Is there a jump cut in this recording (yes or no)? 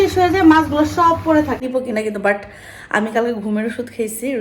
yes